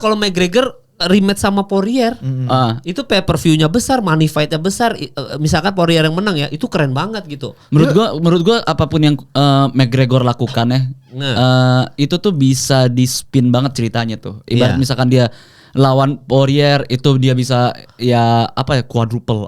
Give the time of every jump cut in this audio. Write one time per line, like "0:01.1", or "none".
0:07.5